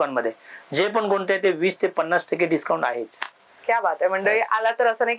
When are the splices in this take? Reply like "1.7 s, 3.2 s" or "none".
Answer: none